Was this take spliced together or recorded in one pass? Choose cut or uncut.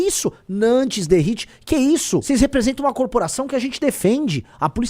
cut